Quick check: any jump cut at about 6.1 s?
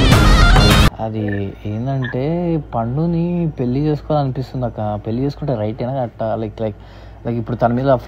no; 1 cut; at 1.0 s

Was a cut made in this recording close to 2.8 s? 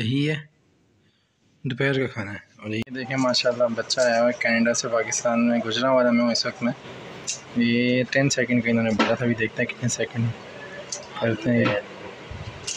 yes; 1 cut; at 2.8 s

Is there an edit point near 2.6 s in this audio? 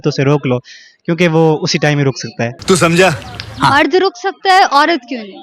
no; 0 cuts

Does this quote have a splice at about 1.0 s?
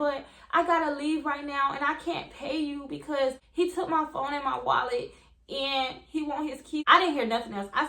no; 2 cuts; at 3.4 s, 6.8 s

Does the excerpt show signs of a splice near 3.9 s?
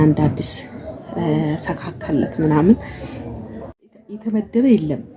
yes; 1 cut; at 3.9 s

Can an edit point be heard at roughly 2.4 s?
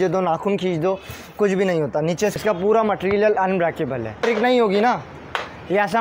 yes; 2 cuts; at 2.4 s, 4.2 s

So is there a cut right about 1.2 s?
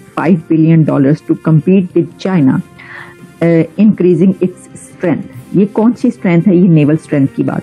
no; 0 cuts

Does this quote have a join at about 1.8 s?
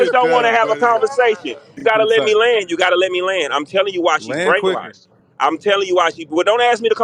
yes; 1 cut; at 1.8 s

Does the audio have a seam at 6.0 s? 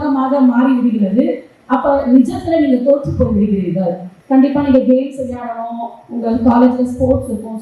no; 1 cut; at 4.1 s

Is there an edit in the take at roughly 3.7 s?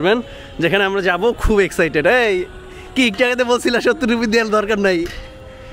no; 0 cuts

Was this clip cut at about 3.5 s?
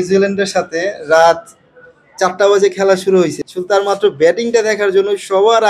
yes; 1 cut; at 3.5 s

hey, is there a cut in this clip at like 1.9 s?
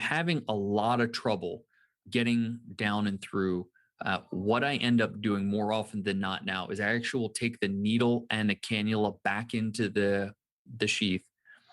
yes; 1 cut; at 1.9 s

